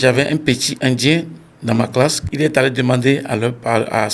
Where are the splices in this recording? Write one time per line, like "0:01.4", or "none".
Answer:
0:02.2